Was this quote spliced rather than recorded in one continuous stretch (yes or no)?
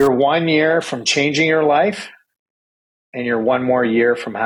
no